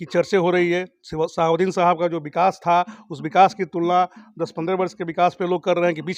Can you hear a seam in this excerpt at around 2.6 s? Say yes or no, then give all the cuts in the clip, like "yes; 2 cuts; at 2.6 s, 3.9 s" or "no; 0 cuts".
no; 0 cuts